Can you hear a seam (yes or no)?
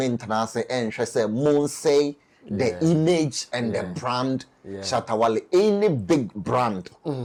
no